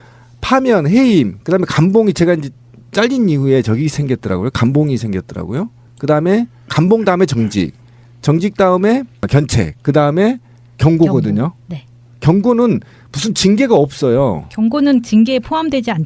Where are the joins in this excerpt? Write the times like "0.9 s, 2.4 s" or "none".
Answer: 1.0 s

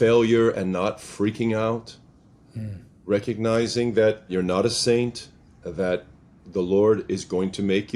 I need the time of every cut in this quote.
4.3 s

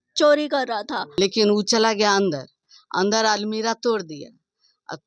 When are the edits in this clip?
1.0 s

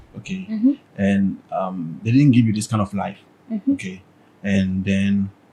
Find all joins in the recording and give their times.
none

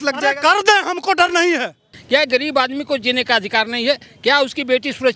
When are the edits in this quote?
1.9 s

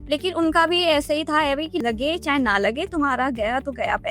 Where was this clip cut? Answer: 1.8 s

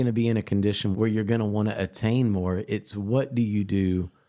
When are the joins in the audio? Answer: 0.9 s

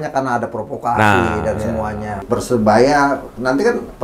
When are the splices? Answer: 2.2 s

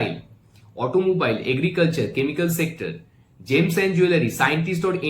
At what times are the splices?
none

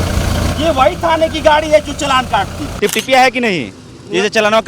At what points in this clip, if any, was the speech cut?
2.6 s

